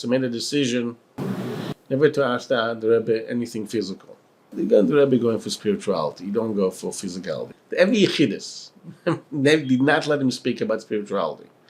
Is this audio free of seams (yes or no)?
no